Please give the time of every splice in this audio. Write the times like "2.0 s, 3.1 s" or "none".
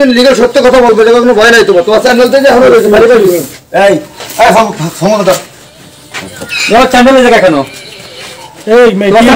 none